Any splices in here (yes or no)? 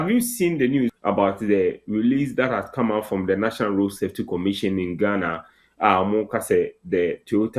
yes